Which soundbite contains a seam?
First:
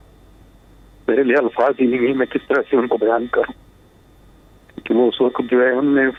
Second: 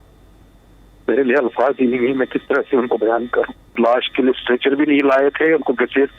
second; 1 cut; at 3.8 s

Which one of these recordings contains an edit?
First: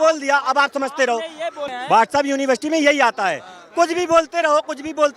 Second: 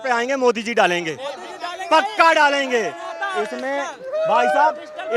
first; 1 cut; at 1.6 s

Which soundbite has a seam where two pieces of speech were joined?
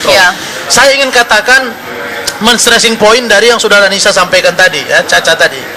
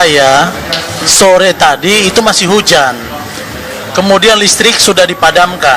first; 1 cut; at 4.3 s

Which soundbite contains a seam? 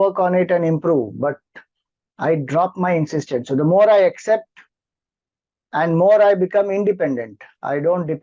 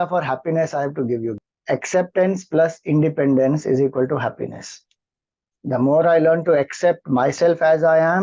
second; 1 cut; at 1.4 s

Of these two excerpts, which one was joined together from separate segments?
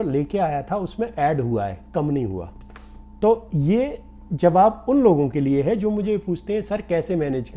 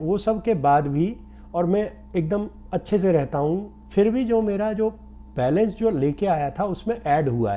second; 1 cut; at 3.8 s

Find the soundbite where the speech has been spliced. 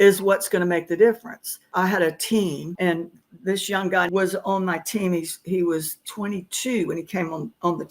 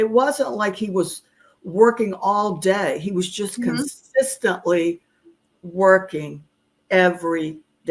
first; 3 cuts; at 1.6 s, 2.7 s, 4.1 s

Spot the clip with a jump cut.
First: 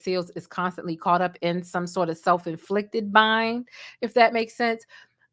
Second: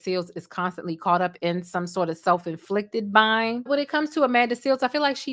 second; 1 cut; at 3.7 s

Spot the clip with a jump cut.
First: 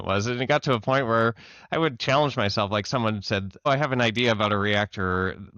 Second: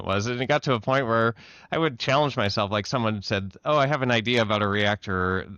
first; 1 cut; at 3.7 s

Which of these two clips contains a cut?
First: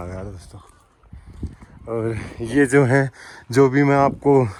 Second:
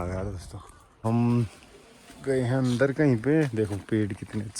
second; 1 cut; at 1.0 s

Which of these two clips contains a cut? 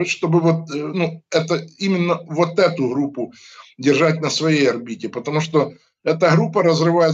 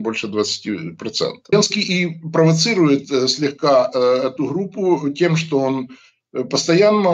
second; 1 cut; at 1.5 s

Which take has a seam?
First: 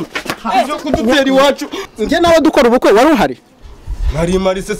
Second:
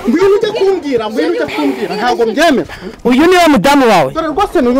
first; 1 cut; at 1.8 s

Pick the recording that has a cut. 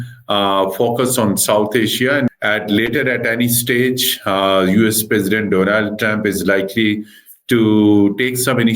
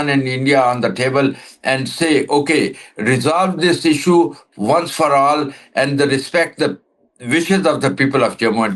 first; 1 cut; at 2.3 s

